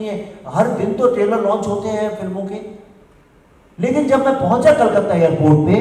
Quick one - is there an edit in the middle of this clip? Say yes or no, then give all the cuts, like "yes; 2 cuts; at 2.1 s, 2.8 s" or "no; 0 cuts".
no; 0 cuts